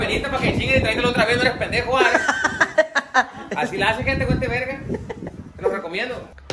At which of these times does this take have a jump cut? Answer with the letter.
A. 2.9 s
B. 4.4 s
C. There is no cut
C